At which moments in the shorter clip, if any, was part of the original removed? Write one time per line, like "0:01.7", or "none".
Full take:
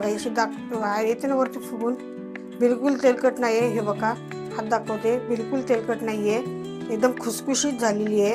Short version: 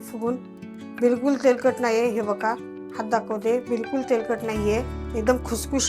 0:05.0